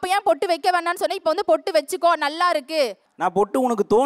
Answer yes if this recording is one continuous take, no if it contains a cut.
no